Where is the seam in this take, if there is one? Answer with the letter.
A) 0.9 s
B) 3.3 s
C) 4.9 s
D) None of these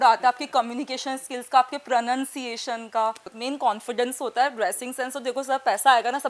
B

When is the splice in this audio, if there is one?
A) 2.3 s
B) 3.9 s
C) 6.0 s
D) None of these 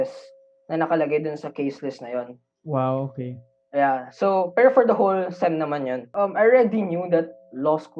C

